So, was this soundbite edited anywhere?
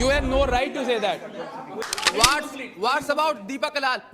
yes; 1 cut; at 1.8 s

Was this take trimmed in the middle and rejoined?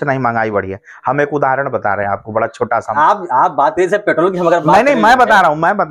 yes; 1 cut; at 2.9 s

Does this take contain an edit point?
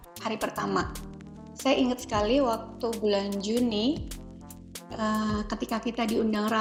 no; 0 cuts

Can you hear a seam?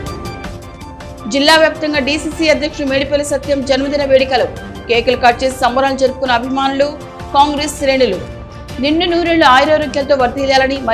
yes; 1 cut; at 1.1 s

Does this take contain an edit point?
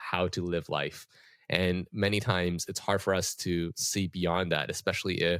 no; 0 cuts

